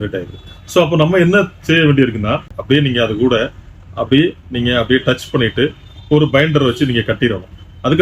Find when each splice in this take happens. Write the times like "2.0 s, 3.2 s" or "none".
2.5 s